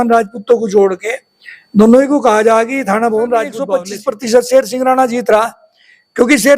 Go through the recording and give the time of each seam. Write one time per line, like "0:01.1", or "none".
0:03.8